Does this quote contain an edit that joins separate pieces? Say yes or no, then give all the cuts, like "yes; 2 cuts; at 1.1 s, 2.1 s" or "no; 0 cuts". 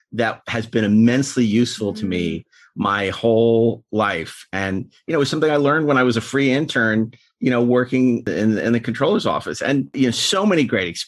yes; 2 cuts; at 8.3 s, 9.9 s